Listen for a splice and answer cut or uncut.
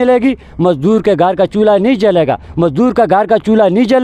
uncut